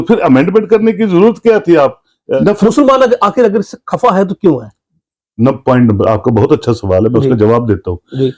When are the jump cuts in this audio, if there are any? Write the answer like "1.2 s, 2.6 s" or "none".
2.3 s